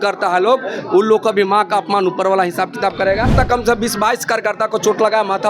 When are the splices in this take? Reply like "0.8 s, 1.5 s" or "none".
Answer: 3.3 s